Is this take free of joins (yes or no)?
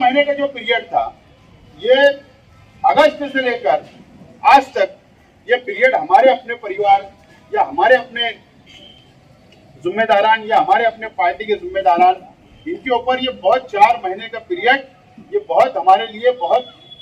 yes